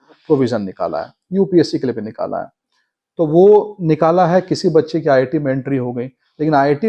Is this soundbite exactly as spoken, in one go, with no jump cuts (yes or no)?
yes